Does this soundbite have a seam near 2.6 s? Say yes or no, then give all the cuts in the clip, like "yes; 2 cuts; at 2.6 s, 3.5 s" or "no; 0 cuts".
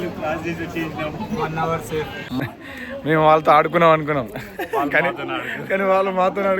yes; 1 cut; at 2.6 s